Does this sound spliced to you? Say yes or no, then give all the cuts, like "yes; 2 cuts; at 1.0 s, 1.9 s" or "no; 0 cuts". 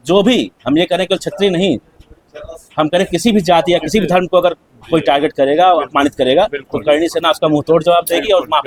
no; 0 cuts